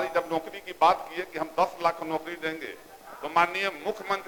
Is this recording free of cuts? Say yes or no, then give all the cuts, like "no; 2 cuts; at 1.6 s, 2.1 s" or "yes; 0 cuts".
yes; 0 cuts